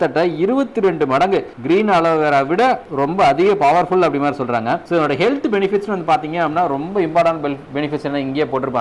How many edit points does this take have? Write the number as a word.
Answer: zero